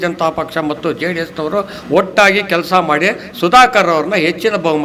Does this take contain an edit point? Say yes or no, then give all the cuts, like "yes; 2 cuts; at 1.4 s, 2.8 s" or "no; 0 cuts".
no; 0 cuts